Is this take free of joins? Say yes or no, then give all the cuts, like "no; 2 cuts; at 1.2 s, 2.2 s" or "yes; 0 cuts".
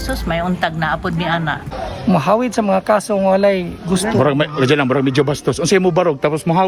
no; 1 cut; at 1.6 s